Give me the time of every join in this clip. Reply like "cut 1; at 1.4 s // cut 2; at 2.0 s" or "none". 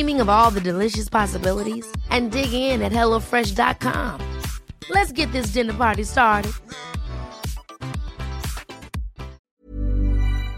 cut 1; at 9.5 s